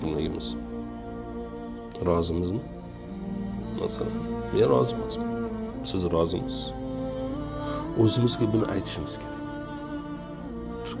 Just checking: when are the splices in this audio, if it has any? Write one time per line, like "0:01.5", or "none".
none

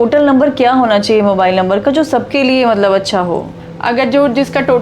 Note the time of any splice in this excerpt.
0:03.5

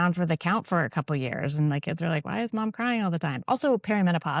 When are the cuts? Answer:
none

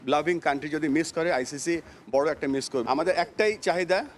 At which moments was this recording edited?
0:02.8

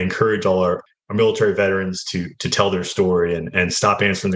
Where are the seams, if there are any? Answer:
0:00.9
0:03.5

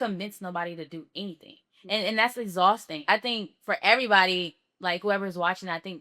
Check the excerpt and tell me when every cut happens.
0:03.0

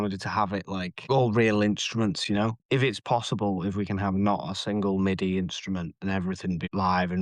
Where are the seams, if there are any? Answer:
0:02.6

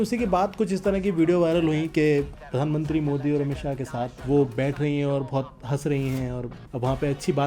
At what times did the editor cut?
0:02.3
0:04.2
0:06.5

